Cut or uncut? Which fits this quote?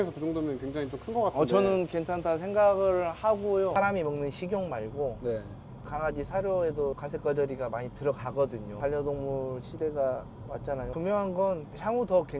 cut